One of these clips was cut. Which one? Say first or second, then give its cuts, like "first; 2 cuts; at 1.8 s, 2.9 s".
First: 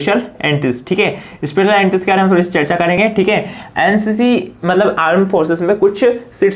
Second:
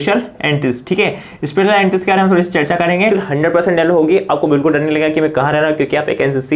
second; 1 cut; at 3.0 s